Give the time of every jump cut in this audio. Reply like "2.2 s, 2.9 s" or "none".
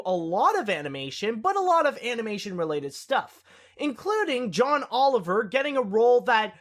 1.2 s